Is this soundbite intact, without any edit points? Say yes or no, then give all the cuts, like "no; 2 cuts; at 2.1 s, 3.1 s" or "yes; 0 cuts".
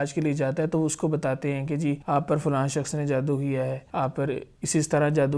no; 2 cuts; at 2.0 s, 3.8 s